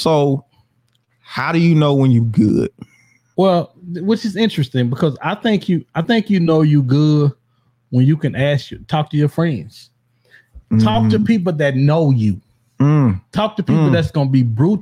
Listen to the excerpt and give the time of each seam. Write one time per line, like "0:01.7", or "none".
0:03.2